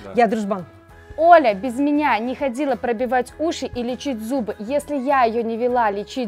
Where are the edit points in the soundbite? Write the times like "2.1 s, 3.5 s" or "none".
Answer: 1.0 s